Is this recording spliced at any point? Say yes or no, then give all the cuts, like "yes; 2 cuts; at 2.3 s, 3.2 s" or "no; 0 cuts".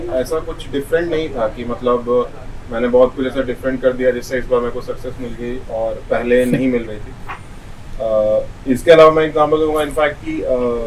no; 0 cuts